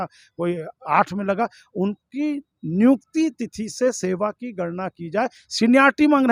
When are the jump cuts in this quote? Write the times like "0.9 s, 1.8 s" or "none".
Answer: none